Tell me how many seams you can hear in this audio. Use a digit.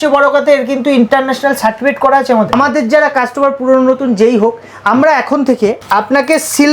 2